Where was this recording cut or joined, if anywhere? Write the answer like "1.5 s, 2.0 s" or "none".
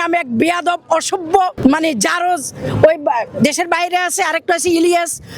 1.6 s